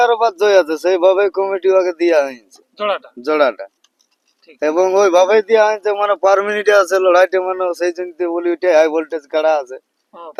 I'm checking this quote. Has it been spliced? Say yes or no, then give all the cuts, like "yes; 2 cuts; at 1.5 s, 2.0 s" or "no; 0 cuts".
no; 0 cuts